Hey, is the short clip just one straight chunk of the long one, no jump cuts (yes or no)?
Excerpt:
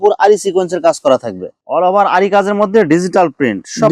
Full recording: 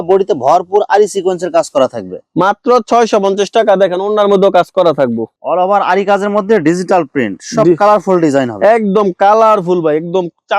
no